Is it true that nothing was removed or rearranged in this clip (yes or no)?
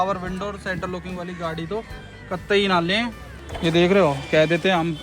no